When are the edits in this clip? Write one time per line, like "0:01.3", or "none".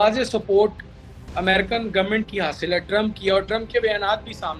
none